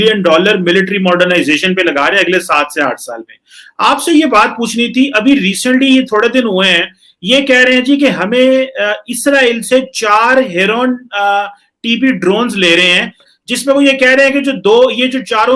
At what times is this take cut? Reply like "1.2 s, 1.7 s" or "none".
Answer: none